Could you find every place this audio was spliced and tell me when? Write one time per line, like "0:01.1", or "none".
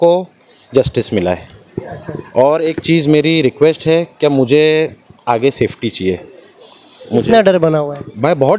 none